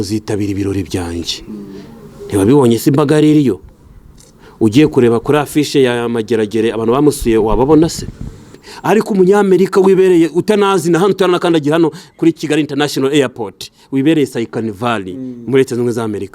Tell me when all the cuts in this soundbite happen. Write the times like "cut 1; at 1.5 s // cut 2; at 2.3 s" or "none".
cut 1; at 8.7 s